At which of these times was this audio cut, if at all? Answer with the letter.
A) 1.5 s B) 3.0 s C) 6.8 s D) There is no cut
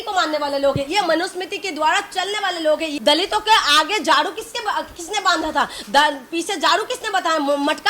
B